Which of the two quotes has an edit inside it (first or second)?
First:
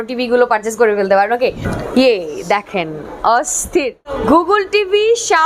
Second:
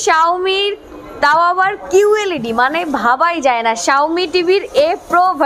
first